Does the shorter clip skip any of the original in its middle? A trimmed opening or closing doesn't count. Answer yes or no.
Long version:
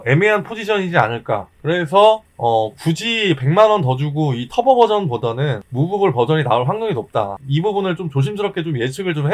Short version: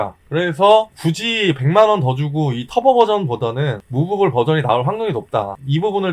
yes